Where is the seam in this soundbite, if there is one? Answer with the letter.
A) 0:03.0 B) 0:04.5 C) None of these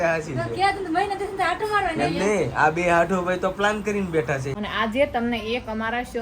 B